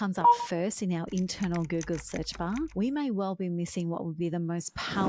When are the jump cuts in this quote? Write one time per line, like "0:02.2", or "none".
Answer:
none